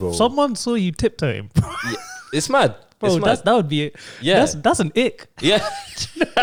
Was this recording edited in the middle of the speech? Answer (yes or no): no